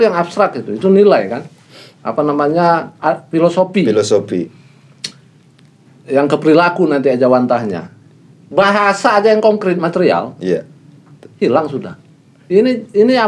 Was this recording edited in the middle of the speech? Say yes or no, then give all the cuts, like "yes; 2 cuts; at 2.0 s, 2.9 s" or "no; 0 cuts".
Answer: no; 0 cuts